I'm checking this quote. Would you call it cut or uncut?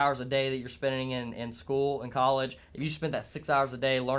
uncut